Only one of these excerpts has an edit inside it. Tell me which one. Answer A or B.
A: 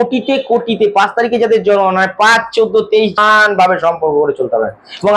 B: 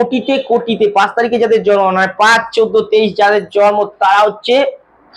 A